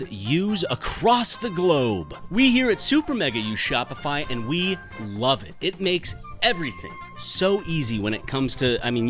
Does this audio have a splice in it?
yes; 1 cut; at 2.2 s

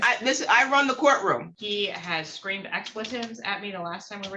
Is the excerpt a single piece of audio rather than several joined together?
no; 1 cut; at 1.5 s

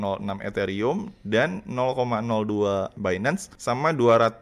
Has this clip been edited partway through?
yes; 1 cut; at 3.1 s

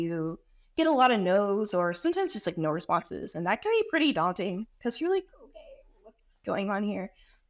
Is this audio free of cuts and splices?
yes; 0 cuts

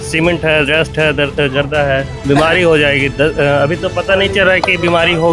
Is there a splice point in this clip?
no; 0 cuts

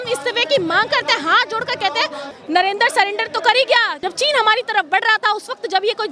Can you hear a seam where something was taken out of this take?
yes; 2 cuts; at 2.2 s, 3.9 s

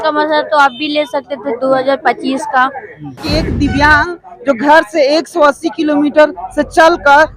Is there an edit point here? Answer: yes; 1 cut; at 3.2 s

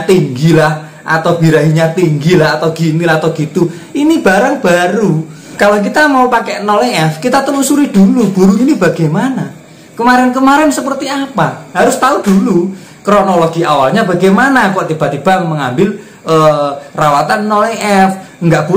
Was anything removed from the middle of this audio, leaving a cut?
yes; 2 cuts; at 5.4 s, 11.6 s

